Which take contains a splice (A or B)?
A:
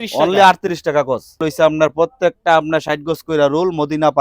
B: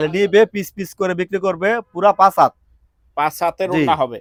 A